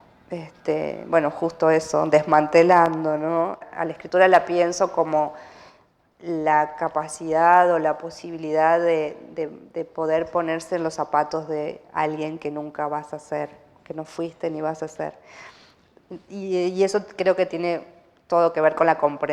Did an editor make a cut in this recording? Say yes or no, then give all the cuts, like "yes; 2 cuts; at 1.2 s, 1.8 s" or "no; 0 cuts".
yes; 1 cut; at 3.7 s